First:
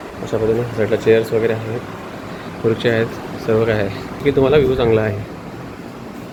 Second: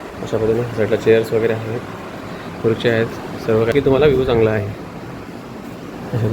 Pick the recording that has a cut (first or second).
second